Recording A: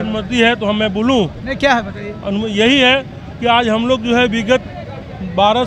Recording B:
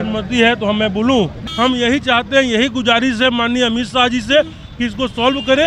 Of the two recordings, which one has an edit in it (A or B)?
B